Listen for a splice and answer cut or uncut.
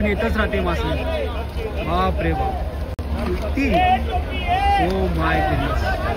uncut